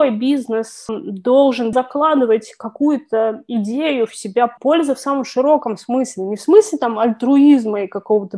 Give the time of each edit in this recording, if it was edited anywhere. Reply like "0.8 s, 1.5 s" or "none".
1.7 s, 4.5 s

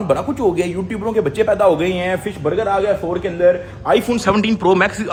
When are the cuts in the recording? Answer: none

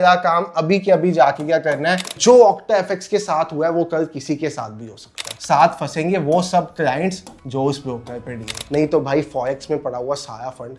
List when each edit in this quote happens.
2.2 s, 5.3 s, 8.6 s

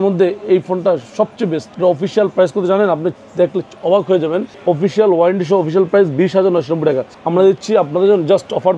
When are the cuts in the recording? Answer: 1.7 s, 4.5 s, 7.1 s

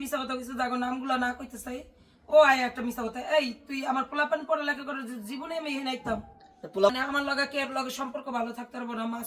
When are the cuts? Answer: 6.9 s

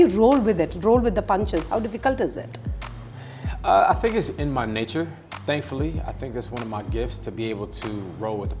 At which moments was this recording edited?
none

